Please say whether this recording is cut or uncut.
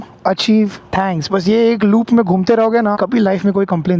cut